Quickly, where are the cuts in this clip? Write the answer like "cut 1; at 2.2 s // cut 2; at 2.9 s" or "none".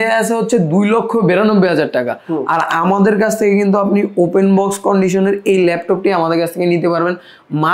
none

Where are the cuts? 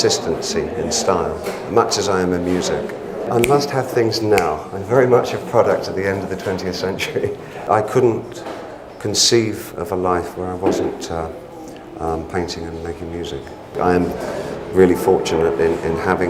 cut 1; at 3.3 s // cut 2; at 7.6 s // cut 3; at 13.8 s

